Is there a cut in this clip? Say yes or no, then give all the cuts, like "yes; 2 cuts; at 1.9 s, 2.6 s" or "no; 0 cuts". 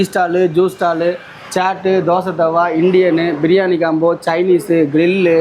no; 0 cuts